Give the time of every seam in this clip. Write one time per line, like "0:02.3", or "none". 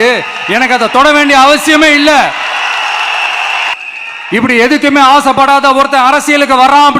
0:03.5